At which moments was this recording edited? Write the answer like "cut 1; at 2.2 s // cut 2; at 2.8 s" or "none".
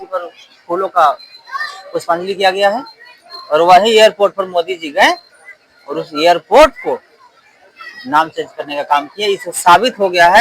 none